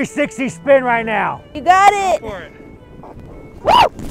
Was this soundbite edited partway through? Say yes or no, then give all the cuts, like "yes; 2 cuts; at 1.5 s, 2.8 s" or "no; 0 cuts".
yes; 1 cut; at 1.4 s